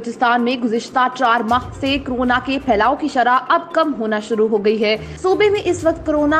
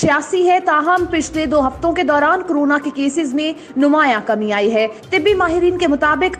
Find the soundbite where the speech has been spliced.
first; 1 cut; at 5.1 s

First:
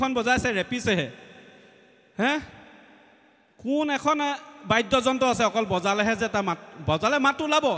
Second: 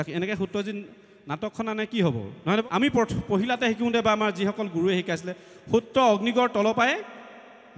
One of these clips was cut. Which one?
second; 1 cut; at 2.6 s

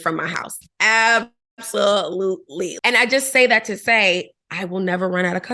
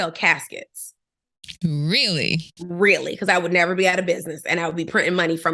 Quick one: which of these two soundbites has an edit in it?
first; 1 cut; at 2.7 s

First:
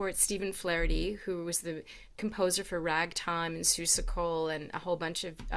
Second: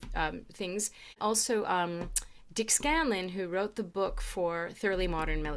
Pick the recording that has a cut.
second; 1 cut; at 1.2 s

